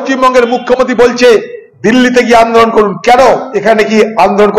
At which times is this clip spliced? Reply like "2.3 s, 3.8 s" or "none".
3.5 s